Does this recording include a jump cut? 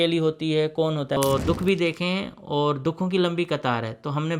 yes; 1 cut; at 1.2 s

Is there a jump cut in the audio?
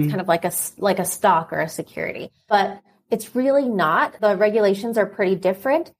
yes; 2 cuts; at 2.4 s, 4.1 s

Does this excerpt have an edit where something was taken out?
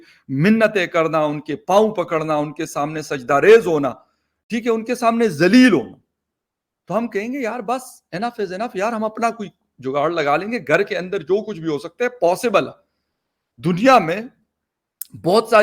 no; 0 cuts

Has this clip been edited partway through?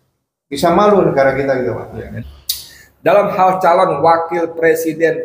yes; 1 cut; at 2.0 s

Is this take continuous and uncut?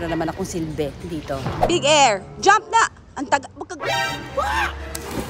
no; 1 cut; at 1.6 s

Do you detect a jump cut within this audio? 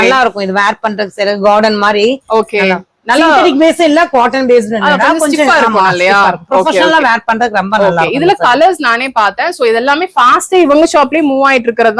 no; 0 cuts

